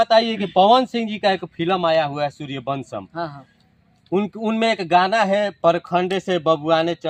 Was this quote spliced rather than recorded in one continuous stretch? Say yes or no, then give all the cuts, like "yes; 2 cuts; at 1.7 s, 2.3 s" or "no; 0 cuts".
no; 0 cuts